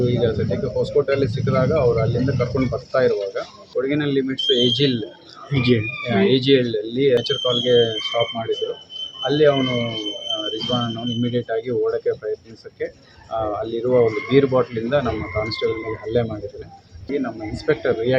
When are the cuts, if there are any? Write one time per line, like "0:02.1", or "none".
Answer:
0:03.6
0:07.2
0:17.1